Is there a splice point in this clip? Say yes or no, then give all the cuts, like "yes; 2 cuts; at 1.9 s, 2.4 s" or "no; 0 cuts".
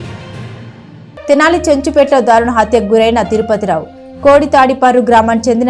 yes; 1 cut; at 1.3 s